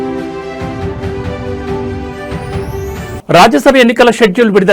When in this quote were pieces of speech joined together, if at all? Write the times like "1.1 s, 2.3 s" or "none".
3.1 s